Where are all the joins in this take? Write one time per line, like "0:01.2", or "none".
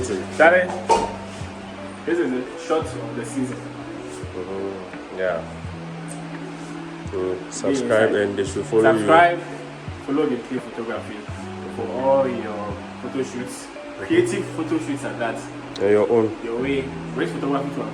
none